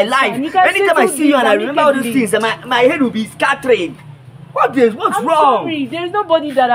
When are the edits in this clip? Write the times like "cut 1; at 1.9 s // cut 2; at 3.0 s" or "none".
none